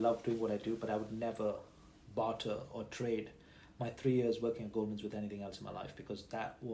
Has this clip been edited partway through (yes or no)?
no